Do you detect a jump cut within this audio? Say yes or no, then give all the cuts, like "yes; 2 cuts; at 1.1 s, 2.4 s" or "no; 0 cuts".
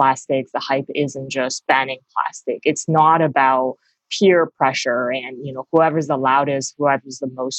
yes; 2 cuts; at 2.8 s, 5.6 s